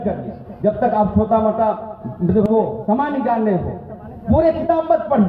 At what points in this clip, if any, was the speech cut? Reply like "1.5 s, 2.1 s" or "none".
2.5 s